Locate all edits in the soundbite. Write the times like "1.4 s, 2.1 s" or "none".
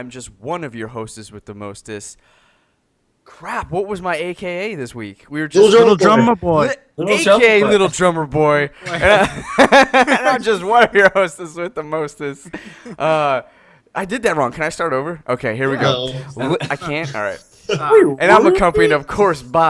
9.5 s